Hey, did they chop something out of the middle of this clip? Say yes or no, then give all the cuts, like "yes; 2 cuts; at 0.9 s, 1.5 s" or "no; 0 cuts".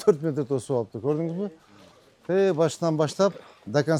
no; 0 cuts